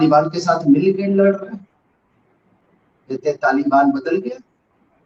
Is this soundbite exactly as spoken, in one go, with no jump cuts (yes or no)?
yes